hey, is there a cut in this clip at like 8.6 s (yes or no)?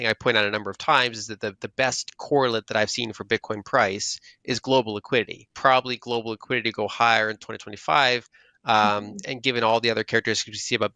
no